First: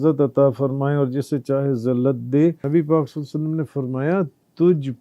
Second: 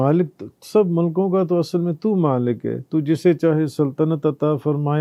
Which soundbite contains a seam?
first; 1 cut; at 2.6 s

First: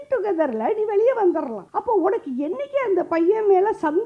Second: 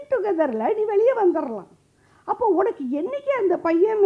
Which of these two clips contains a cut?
first; 1 cut; at 1.6 s

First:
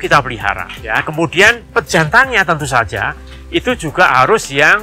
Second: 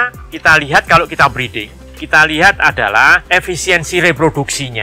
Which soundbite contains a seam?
second; 1 cut; at 3.2 s

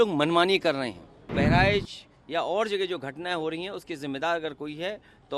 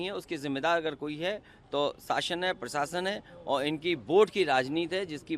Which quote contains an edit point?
first; 1 cut; at 1.3 s

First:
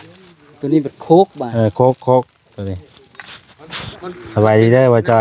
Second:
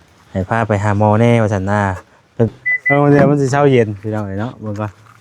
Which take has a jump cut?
second; 1 cut; at 2.5 s

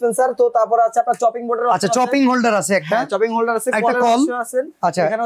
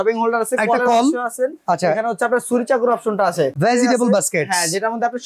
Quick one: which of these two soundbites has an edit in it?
second; 1 cut; at 3.5 s

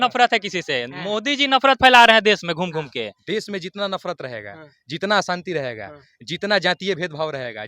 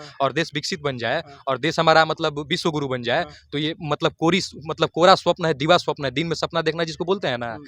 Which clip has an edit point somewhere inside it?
first; 1 cut; at 3.2 s

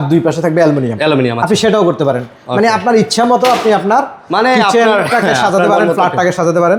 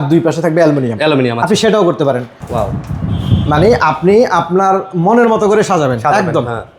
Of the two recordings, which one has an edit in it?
second; 1 cut; at 2.3 s

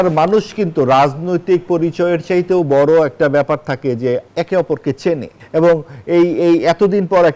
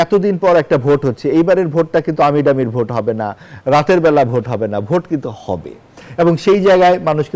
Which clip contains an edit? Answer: first; 2 cuts; at 4.3 s, 5.3 s

